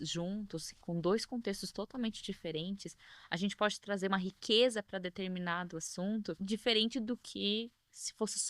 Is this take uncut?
no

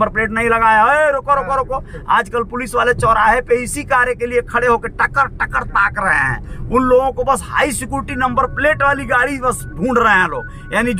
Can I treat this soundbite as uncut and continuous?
no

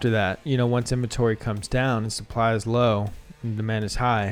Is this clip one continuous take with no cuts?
yes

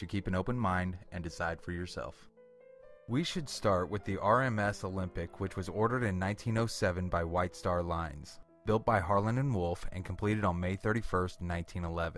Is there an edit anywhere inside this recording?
yes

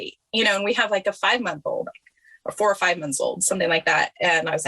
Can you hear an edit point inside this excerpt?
no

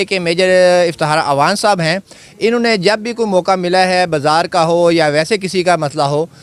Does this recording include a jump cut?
no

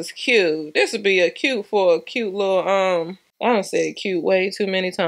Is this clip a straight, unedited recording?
yes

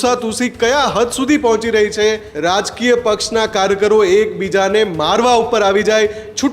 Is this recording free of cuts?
no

